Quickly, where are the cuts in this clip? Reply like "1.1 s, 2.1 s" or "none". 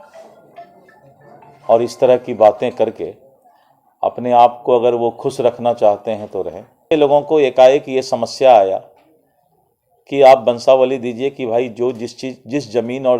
6.9 s